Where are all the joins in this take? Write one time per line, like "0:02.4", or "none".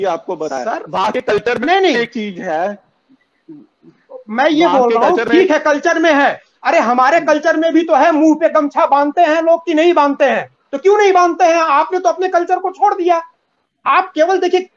none